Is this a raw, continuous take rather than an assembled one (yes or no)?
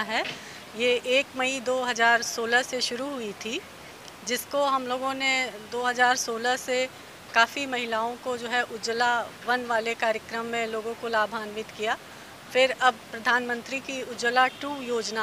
yes